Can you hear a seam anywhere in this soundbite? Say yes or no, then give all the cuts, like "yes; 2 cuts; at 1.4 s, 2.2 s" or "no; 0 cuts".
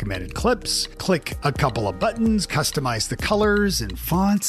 no; 0 cuts